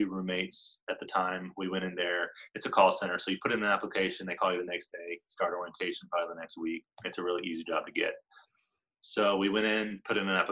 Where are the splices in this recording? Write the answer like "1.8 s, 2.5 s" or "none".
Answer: none